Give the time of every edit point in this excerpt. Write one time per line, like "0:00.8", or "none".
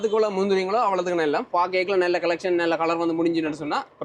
0:01.5